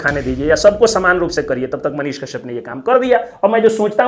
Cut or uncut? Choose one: uncut